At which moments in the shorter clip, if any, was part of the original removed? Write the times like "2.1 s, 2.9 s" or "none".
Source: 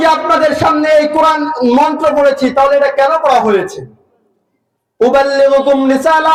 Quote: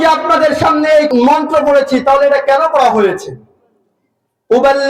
1.1 s